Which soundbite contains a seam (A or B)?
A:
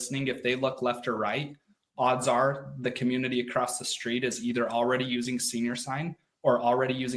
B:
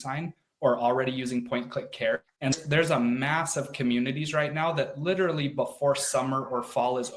B